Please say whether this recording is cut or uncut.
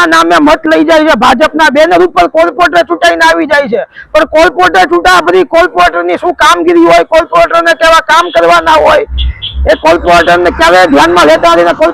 uncut